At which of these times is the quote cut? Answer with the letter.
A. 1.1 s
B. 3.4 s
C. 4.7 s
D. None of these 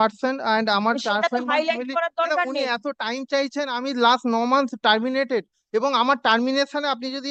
D